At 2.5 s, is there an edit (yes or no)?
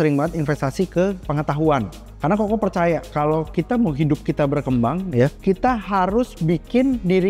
no